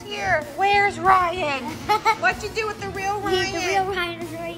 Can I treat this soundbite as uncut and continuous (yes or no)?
yes